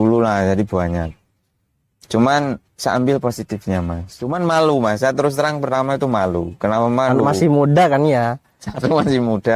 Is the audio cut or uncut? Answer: cut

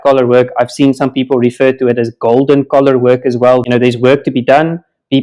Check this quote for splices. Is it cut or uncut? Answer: cut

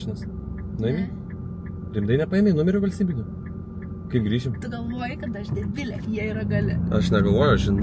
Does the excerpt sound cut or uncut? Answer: uncut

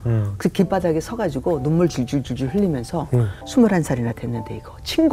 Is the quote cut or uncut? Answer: cut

